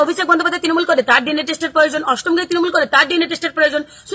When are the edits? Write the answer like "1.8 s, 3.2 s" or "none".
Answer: none